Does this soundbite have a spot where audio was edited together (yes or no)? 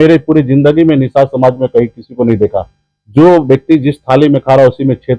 no